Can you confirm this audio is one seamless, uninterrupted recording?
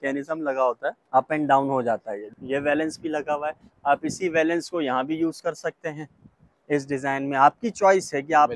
no; 2 cuts; at 1.0 s, 2.3 s

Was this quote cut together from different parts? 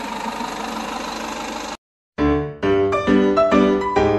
yes; 1 cut; at 1.8 s

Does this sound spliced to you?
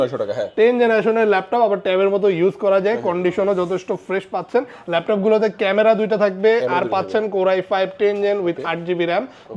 no; 0 cuts

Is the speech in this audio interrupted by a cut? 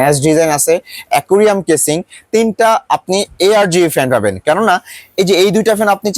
no; 0 cuts

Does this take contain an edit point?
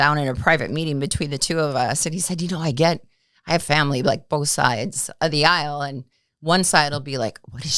no; 0 cuts

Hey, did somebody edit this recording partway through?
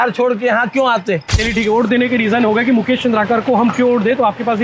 yes; 1 cut; at 1.4 s

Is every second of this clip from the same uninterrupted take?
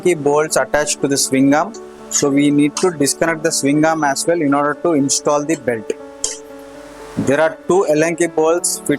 yes; 0 cuts

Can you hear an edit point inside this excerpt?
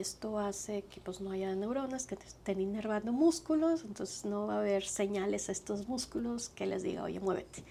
no; 0 cuts

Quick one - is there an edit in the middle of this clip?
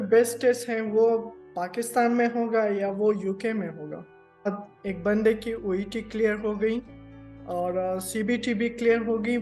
yes; 1 cut; at 4.7 s

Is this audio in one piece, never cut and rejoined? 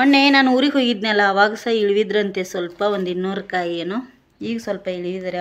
yes; 0 cuts

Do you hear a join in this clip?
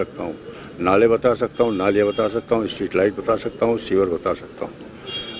no; 0 cuts

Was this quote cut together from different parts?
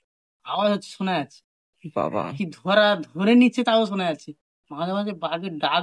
no; 0 cuts

